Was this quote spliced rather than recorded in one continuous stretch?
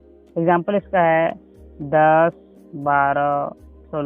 no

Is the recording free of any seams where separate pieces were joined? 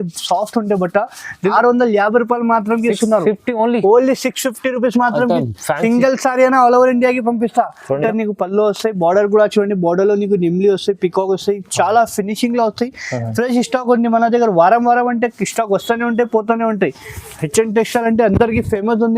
no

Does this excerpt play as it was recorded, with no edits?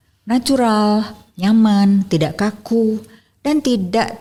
yes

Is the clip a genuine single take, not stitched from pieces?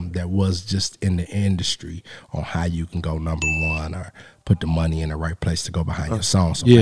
yes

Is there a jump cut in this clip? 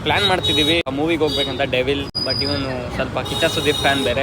yes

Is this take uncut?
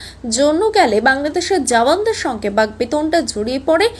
yes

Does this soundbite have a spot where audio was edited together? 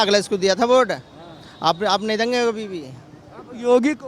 no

